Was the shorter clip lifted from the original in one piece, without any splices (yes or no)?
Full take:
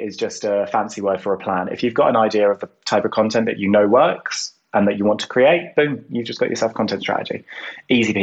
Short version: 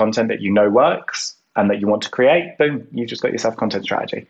yes